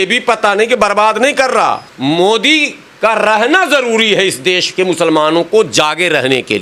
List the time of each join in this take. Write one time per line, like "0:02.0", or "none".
0:01.9